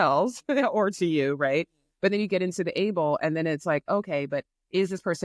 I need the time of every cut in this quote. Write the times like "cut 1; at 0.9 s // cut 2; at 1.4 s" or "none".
none